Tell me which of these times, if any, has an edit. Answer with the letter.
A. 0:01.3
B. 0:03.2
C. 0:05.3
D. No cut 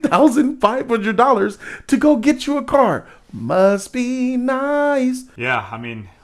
C